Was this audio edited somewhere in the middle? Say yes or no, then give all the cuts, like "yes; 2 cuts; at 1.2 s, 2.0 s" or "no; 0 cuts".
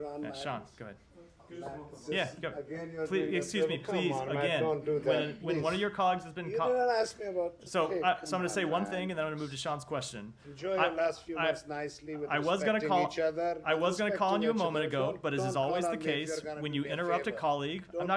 no; 0 cuts